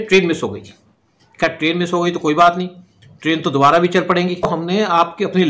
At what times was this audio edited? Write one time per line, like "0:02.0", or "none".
0:04.5